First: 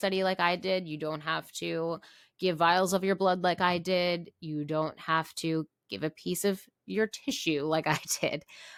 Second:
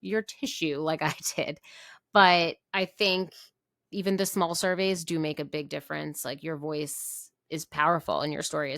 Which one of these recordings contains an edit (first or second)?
second